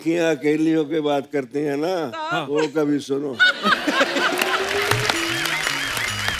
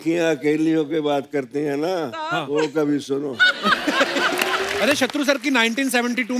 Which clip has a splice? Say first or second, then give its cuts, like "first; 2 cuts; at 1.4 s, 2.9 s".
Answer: second; 1 cut; at 4.8 s